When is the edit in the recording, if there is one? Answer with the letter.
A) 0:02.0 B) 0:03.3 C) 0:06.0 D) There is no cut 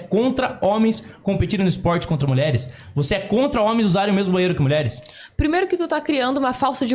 D